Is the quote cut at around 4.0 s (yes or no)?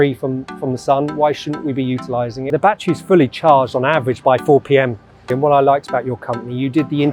no